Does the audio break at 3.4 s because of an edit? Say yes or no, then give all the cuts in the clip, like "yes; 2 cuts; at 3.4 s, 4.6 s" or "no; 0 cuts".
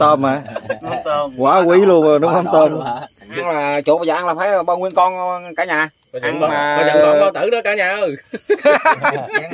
yes; 1 cut; at 3.4 s